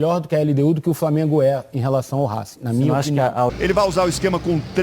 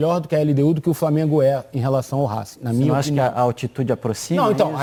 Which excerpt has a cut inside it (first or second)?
first